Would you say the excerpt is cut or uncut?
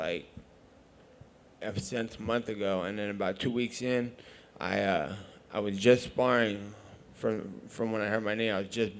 uncut